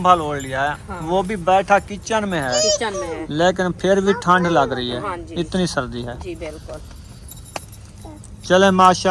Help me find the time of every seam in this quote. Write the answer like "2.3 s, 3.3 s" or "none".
none